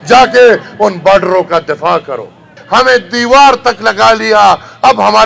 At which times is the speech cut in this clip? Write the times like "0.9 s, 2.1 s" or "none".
2.5 s